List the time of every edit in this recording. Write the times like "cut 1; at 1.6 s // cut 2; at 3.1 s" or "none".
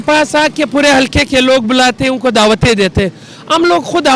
none

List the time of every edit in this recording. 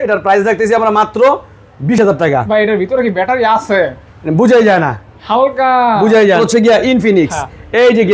none

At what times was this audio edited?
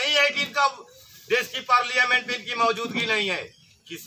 none

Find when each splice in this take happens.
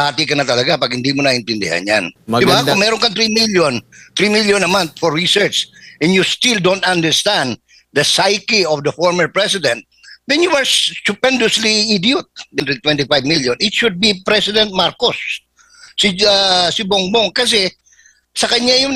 cut 1; at 2.2 s // cut 2; at 12.6 s

